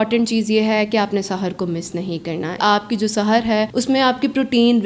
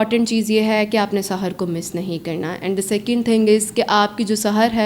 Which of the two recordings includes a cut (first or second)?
first